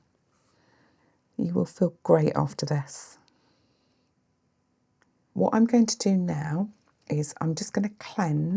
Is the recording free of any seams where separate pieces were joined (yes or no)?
no